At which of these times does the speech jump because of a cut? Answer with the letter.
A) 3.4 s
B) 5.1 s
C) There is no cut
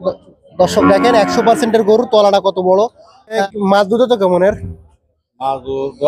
A